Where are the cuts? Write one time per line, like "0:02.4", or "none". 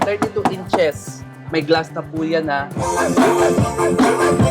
0:02.7